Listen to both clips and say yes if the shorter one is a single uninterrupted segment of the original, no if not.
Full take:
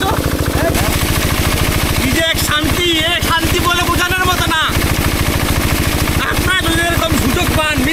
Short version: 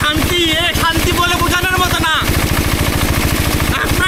yes